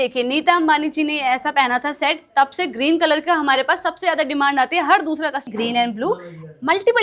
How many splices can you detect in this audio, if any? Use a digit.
1